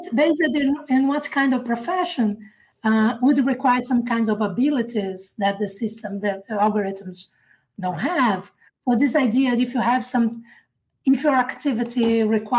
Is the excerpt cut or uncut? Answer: uncut